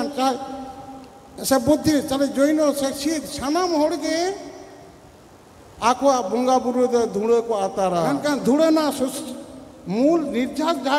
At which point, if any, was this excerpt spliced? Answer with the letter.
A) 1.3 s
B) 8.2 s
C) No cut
B